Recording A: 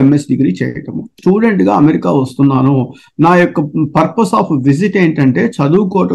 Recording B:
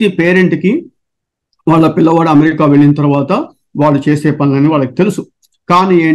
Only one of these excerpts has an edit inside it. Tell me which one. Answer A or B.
A